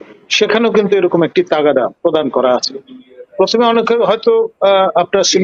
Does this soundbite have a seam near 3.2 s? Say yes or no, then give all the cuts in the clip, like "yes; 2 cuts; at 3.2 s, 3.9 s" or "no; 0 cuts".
no; 0 cuts